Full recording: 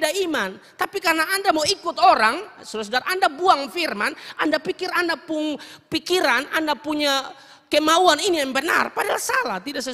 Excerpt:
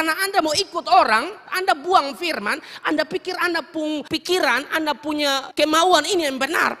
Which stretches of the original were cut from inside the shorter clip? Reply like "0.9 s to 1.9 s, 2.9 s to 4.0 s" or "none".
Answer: 2.6 s to 3.0 s, 5.6 s to 5.9 s, 7.3 s to 7.6 s